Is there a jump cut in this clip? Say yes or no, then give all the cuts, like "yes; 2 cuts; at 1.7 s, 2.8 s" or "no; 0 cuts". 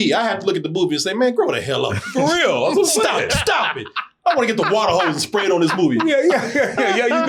no; 0 cuts